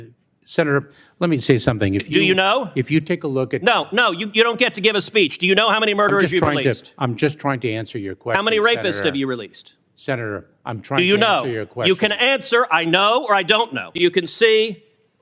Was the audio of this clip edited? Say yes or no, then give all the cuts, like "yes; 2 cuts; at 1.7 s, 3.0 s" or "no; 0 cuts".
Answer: yes; 1 cut; at 13.9 s